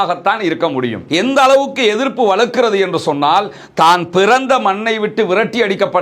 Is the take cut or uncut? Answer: cut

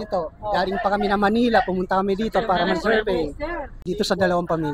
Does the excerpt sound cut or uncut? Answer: cut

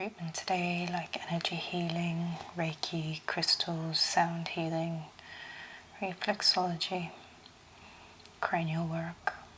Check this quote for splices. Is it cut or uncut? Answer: uncut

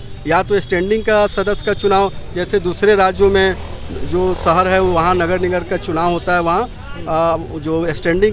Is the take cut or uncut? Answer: uncut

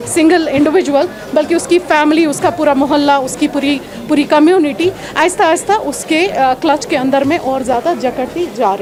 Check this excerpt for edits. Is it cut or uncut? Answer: uncut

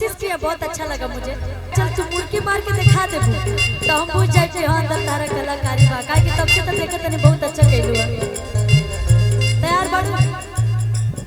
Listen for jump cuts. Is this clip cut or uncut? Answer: cut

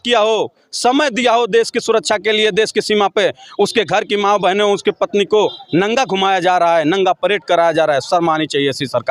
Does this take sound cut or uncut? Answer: uncut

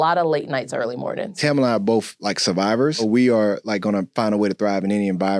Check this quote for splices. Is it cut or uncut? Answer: cut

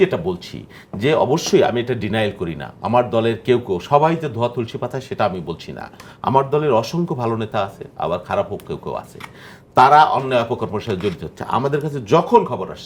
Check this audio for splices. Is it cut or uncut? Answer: uncut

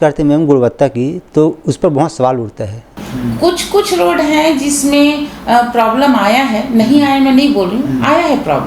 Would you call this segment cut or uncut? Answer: cut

